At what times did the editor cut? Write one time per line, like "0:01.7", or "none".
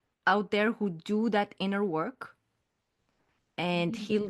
none